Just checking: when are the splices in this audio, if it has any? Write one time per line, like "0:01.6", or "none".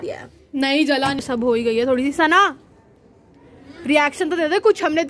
0:01.2